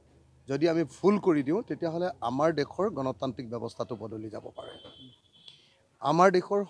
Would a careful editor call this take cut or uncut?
uncut